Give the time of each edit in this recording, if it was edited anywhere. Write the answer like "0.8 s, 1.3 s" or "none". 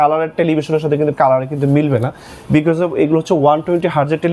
none